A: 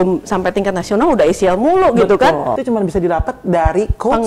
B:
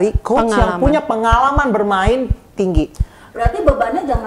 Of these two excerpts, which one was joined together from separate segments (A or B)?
A